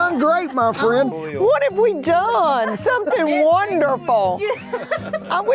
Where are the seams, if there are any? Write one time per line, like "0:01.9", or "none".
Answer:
0:01.1